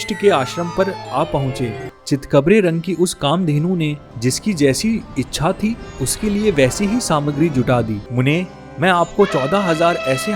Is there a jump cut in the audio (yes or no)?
yes